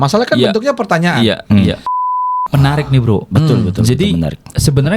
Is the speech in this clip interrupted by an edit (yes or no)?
yes